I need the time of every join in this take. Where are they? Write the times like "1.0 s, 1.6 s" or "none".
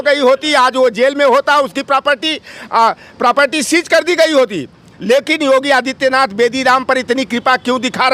none